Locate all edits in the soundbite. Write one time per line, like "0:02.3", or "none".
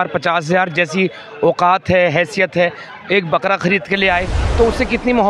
0:04.4